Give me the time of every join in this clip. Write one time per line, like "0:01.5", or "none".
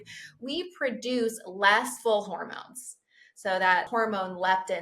0:01.9
0:03.9